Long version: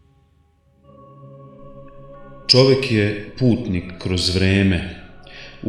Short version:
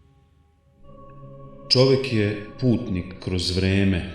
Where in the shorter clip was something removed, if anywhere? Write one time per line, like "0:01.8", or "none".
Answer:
0:01.7